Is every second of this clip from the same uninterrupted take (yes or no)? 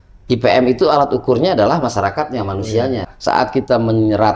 no